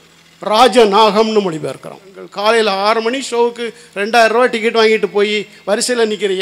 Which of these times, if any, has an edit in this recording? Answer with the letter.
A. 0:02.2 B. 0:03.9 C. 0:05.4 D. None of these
A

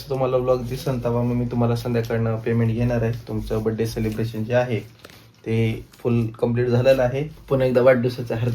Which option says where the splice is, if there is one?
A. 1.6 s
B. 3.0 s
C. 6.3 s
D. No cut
D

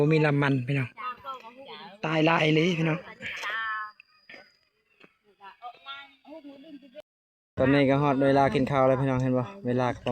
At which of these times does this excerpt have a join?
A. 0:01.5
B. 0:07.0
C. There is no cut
B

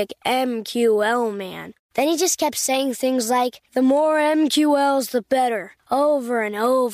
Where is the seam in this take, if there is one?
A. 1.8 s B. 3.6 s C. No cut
C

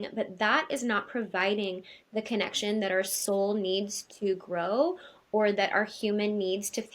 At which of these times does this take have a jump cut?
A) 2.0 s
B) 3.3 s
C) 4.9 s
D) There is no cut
D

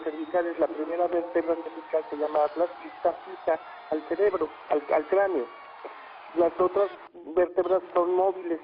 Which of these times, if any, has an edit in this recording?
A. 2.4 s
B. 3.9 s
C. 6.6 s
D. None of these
D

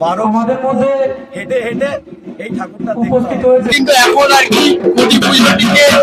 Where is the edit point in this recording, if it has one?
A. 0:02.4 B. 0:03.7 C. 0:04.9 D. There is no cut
B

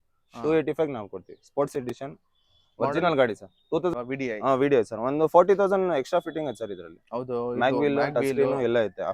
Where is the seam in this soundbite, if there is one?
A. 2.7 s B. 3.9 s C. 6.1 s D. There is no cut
B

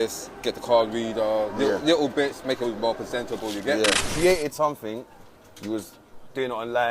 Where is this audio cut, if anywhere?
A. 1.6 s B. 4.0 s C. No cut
B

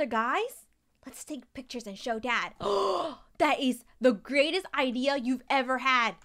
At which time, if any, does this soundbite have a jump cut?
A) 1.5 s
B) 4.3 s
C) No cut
C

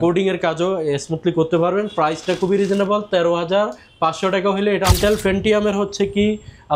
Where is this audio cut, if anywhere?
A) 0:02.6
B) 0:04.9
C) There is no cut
B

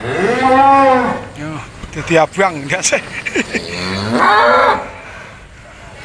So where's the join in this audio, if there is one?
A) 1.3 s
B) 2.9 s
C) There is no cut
A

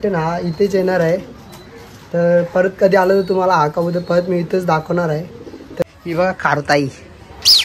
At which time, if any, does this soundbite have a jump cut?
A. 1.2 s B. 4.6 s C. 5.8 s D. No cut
C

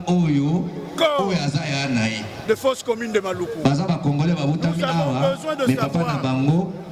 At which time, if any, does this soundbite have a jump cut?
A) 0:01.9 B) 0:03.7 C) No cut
C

